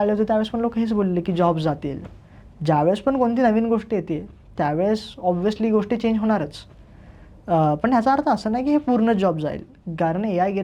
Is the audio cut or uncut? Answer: uncut